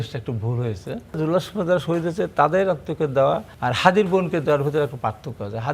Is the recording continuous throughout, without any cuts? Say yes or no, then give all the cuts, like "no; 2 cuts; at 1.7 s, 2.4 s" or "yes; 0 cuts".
no; 2 cuts; at 1.2 s, 3.5 s